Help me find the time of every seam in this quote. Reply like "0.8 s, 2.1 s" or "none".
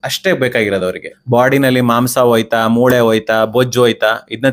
1.1 s